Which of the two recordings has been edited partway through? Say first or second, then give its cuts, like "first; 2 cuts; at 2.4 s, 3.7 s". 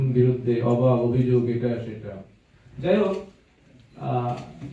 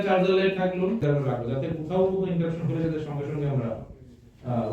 second; 1 cut; at 1.0 s